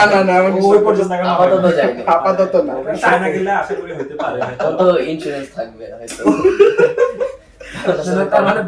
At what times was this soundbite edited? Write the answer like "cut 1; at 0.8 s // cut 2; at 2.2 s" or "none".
none